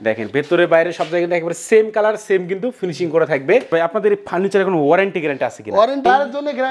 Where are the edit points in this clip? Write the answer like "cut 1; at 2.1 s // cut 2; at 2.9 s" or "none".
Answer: cut 1; at 3.7 s // cut 2; at 6.0 s